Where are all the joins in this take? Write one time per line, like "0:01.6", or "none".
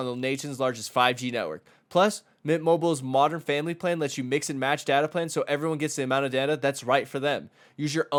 none